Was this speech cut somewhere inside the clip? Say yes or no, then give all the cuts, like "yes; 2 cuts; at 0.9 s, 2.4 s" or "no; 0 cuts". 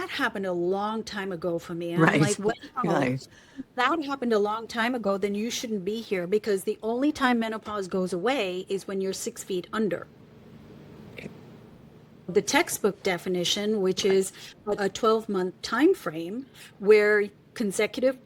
yes; 2 cuts; at 12.3 s, 14.8 s